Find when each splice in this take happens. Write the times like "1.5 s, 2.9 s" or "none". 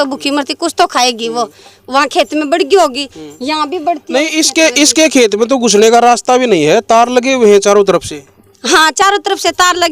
none